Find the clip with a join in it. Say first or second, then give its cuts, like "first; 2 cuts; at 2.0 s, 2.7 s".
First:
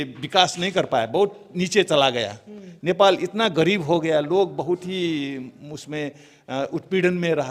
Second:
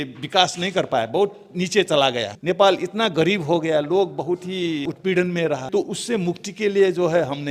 second; 3 cuts; at 2.3 s, 4.8 s, 5.6 s